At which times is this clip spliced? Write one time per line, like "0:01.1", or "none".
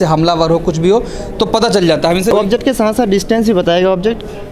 0:02.6